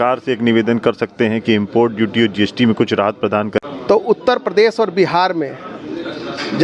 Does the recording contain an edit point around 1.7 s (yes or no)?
no